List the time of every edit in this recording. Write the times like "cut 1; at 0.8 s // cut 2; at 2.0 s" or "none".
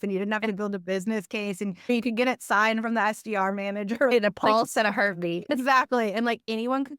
cut 1; at 1.9 s // cut 2; at 4.1 s // cut 3; at 5.4 s